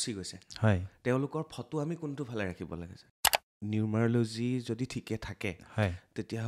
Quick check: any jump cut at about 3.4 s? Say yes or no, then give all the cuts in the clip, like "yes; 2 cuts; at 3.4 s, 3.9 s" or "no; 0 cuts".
yes; 1 cut; at 3.4 s